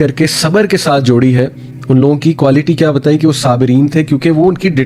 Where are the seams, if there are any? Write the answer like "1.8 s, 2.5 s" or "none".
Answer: none